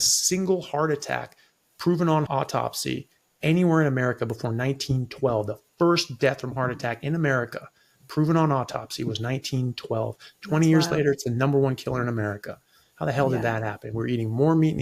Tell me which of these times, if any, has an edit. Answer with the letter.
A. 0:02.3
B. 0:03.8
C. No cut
A